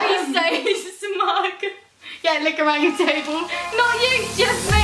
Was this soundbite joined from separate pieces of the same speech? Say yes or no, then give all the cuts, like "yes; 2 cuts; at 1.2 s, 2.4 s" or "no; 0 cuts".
no; 0 cuts